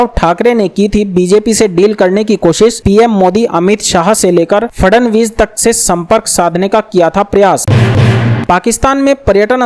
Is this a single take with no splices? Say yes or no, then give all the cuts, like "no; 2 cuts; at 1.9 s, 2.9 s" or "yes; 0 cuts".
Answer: no; 1 cut; at 7.7 s